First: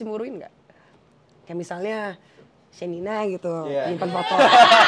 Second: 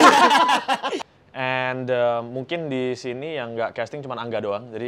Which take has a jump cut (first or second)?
second